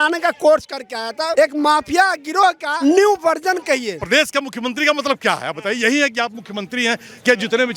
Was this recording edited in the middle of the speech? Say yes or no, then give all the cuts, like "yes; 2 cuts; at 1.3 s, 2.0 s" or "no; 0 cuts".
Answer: yes; 3 cuts; at 1.3 s, 2.7 s, 4.0 s